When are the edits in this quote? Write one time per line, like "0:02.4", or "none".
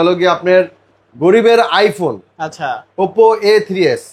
none